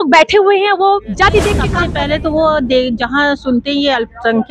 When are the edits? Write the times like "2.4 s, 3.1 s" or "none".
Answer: 1.8 s